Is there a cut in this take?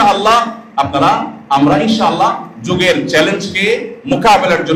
no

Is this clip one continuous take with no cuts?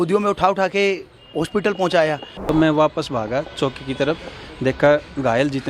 no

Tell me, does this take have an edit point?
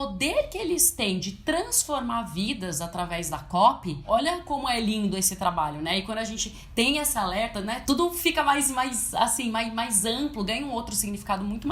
yes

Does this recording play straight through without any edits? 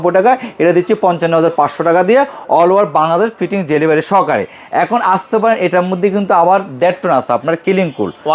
yes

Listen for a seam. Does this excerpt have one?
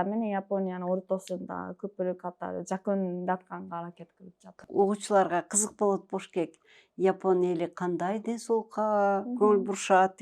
yes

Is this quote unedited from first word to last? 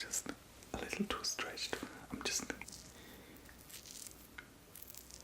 no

